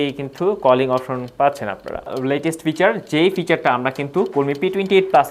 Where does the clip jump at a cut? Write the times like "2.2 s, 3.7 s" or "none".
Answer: 2.1 s